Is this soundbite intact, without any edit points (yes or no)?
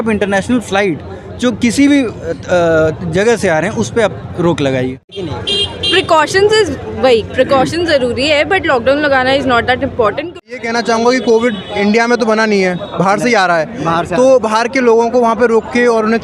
no